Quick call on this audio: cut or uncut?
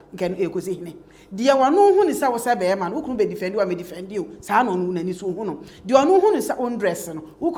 uncut